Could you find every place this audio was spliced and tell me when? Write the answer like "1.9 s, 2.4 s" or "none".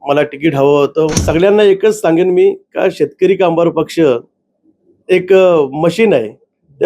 1.2 s